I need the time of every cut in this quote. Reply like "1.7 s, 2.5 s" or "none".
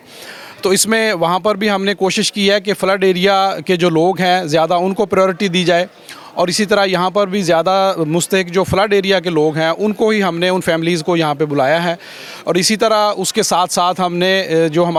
none

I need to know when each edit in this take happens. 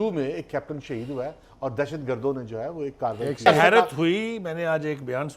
3.5 s

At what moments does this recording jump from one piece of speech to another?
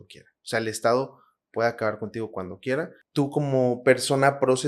3.0 s

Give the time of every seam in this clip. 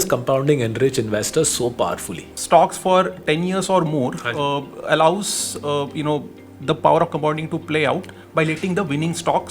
2.3 s

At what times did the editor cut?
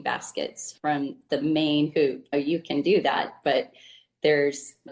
1.2 s

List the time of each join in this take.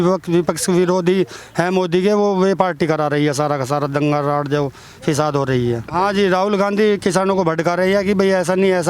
5.9 s

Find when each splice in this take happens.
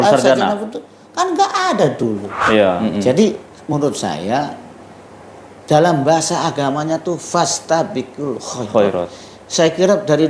2.8 s

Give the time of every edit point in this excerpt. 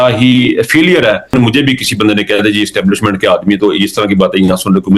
1.3 s

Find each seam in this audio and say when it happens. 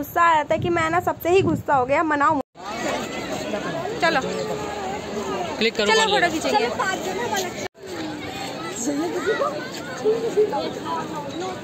none

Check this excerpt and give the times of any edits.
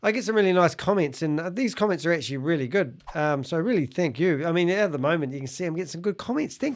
none

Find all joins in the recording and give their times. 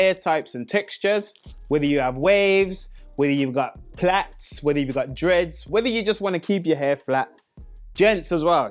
none

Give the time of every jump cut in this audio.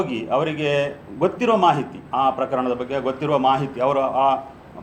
none

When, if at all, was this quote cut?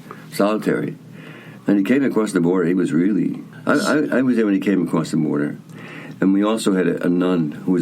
3.5 s

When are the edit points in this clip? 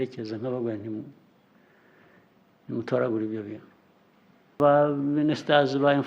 4.6 s

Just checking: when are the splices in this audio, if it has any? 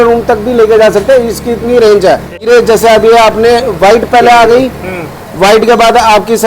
2.4 s

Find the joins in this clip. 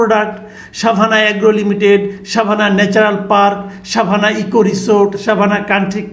none

